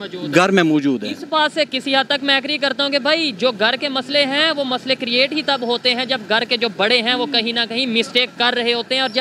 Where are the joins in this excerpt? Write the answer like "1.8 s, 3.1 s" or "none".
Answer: none